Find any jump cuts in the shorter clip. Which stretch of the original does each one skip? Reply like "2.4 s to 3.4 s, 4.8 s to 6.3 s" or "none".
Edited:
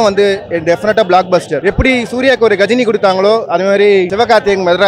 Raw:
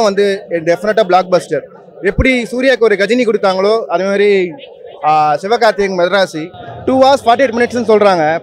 1.5 s to 1.9 s, 4.5 s to 5.4 s